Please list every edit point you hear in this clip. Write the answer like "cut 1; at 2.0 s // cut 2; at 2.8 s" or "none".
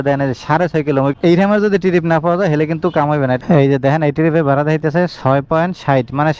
cut 1; at 1.1 s // cut 2; at 3.4 s